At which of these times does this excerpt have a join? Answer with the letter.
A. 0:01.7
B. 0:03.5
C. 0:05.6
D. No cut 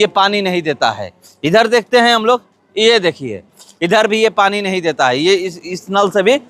D